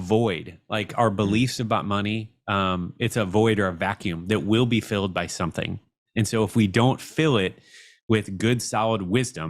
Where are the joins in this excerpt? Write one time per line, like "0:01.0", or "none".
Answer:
none